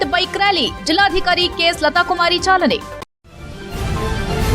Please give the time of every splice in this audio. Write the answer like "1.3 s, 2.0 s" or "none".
3.0 s